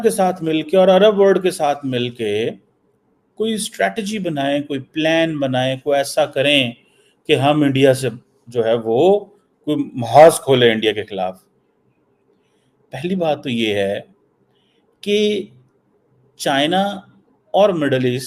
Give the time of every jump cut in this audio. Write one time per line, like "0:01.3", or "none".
none